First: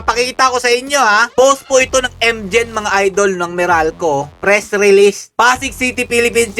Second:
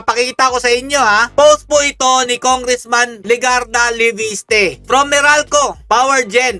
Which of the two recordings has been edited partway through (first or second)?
first